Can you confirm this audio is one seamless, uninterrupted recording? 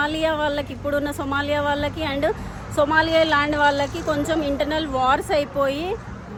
yes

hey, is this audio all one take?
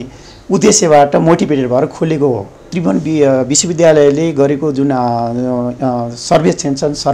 no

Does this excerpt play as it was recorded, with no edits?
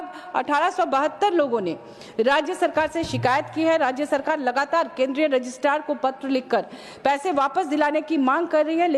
yes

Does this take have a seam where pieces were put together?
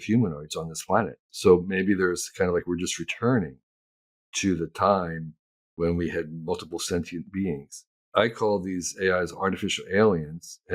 yes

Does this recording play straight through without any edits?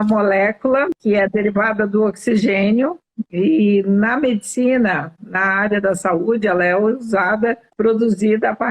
no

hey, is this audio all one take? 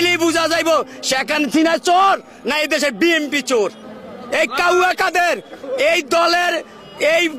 no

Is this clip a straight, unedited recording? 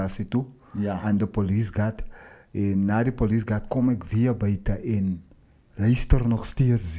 yes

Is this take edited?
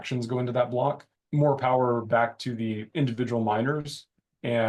yes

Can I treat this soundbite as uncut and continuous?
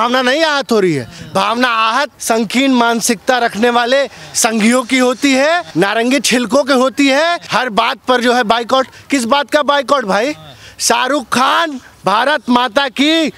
no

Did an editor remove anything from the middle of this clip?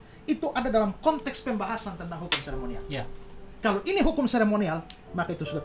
no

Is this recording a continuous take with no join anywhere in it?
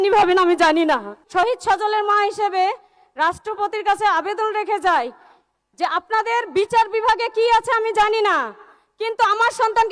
no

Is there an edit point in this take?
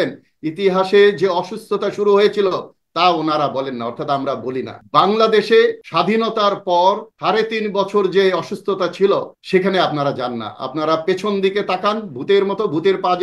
yes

